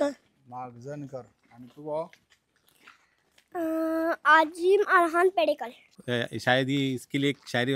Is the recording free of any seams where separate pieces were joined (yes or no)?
no